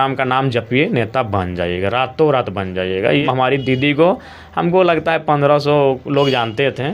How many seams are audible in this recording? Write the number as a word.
one